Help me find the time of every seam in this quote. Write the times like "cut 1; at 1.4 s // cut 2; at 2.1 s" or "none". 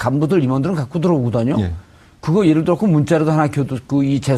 cut 1; at 3.0 s